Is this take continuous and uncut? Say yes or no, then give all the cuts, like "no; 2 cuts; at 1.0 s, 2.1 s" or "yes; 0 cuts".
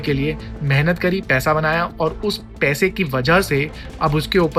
yes; 0 cuts